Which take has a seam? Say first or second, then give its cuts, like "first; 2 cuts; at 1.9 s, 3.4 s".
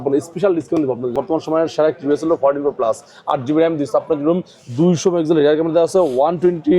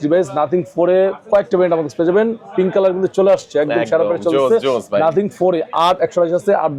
first; 1 cut; at 1.1 s